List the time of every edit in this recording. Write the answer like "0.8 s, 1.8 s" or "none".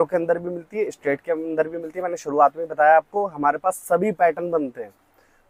none